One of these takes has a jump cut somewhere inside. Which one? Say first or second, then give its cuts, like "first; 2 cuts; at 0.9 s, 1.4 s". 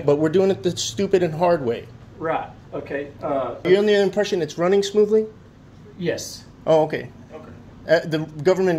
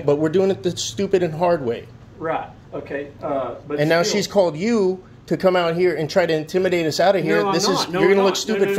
first; 1 cut; at 3.6 s